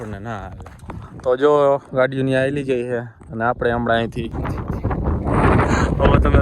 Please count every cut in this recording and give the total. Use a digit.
1